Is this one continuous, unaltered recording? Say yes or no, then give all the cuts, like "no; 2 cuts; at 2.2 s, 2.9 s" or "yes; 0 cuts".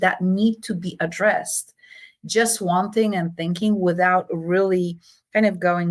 yes; 0 cuts